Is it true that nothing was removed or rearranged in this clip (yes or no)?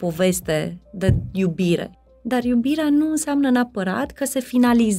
no